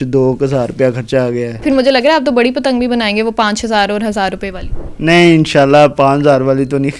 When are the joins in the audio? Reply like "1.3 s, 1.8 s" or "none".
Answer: 1.6 s